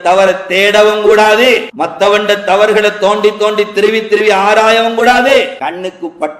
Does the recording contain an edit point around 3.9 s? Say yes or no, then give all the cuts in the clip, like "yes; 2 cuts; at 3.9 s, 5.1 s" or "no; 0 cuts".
no; 2 cuts; at 1.7 s, 5.3 s